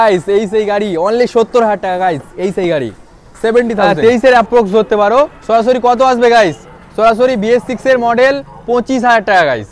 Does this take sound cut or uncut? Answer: cut